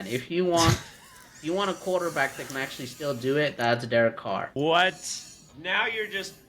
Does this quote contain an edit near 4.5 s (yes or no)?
yes